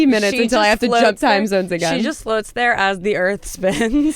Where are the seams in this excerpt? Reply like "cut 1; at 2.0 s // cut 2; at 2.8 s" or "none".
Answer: none

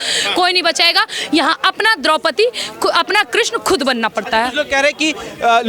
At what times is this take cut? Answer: none

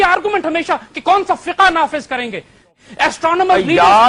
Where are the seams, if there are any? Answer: cut 1; at 2.8 s

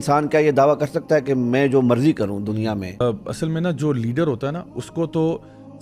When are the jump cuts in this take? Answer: cut 1; at 2.9 s

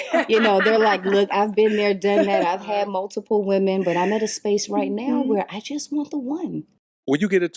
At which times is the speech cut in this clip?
cut 1; at 6.6 s

